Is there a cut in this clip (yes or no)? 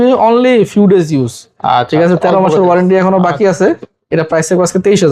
no